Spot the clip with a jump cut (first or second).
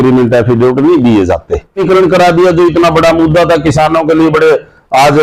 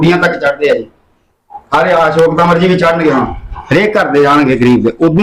first